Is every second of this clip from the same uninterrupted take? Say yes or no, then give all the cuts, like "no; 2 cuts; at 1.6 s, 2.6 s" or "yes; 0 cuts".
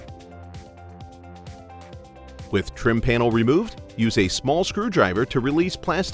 no; 1 cut; at 2.5 s